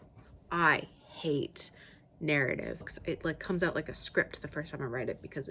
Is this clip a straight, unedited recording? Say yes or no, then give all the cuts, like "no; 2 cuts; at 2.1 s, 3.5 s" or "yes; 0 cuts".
no; 1 cut; at 2.9 s